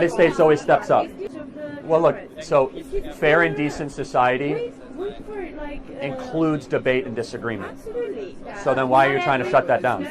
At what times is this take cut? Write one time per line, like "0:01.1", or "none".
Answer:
0:01.2